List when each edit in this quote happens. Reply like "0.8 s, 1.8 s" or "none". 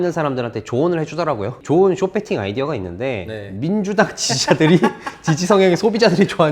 1.6 s